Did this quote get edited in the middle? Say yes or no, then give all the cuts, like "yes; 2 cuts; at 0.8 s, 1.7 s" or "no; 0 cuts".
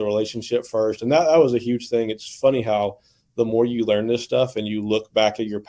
no; 0 cuts